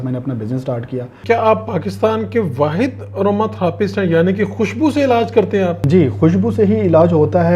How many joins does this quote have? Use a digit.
2